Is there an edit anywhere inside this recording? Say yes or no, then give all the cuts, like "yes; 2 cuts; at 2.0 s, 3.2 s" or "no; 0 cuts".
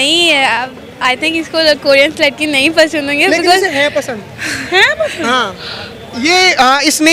no; 0 cuts